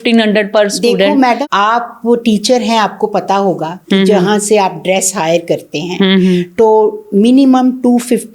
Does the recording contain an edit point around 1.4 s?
yes; 1 cut; at 1.4 s

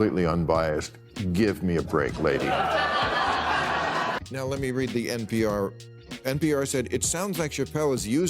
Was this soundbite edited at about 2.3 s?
no; 1 cut; at 4.2 s

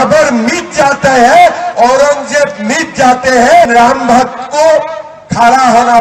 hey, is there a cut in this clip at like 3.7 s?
yes; 1 cut; at 3.7 s

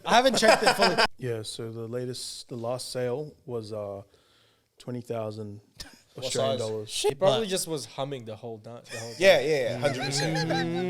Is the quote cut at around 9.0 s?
no; 2 cuts; at 1.1 s, 7.1 s

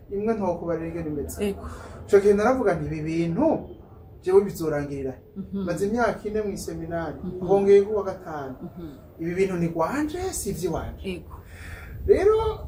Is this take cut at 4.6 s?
no; 0 cuts

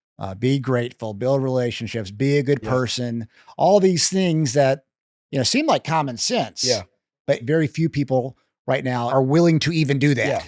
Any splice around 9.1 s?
yes; 2 cuts; at 7.4 s, 9.1 s

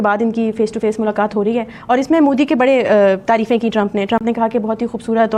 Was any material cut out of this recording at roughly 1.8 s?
no; 0 cuts

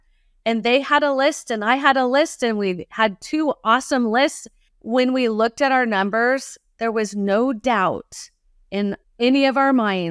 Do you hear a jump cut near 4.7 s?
yes; 1 cut; at 4.7 s

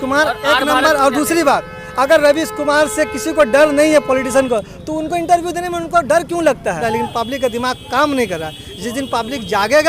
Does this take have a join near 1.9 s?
no; 1 cut; at 6.8 s

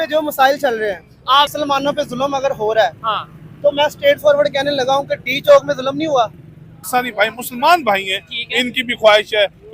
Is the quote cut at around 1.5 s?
yes; 2 cuts; at 1.5 s, 6.9 s

